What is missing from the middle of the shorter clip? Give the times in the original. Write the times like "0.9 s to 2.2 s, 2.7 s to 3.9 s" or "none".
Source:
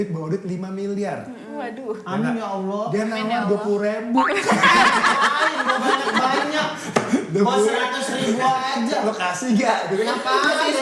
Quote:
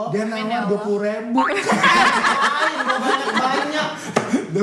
none